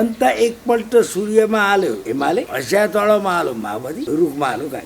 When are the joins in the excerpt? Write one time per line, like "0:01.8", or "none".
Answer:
0:02.1
0:04.0